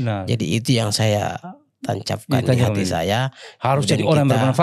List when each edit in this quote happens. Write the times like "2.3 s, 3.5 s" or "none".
none